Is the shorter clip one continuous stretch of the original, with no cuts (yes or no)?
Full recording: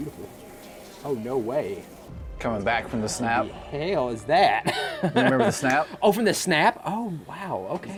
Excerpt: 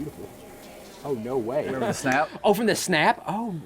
no